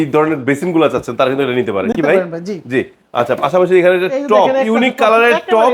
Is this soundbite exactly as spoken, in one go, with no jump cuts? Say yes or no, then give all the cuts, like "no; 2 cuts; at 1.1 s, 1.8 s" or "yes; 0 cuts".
yes; 0 cuts